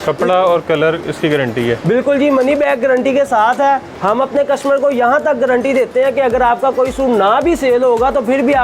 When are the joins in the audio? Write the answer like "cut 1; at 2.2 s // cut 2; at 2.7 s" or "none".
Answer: cut 1; at 3.9 s